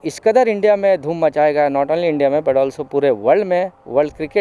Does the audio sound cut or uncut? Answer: uncut